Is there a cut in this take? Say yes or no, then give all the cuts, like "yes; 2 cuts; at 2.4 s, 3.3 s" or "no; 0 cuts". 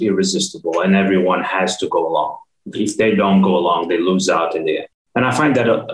yes; 1 cut; at 4.9 s